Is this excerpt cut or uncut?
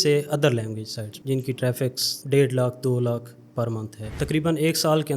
cut